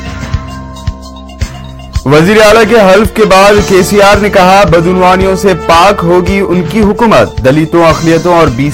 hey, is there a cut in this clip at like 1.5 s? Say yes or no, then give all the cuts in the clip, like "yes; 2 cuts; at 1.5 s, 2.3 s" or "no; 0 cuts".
yes; 1 cut; at 1.5 s